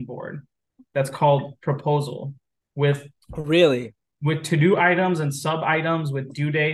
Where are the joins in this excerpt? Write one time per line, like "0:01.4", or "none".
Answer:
none